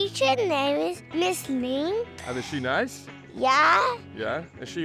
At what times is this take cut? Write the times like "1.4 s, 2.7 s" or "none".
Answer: 1.0 s, 2.2 s